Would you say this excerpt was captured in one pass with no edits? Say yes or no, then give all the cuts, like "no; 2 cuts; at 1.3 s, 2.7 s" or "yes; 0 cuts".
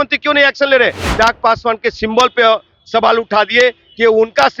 no; 1 cut; at 1.0 s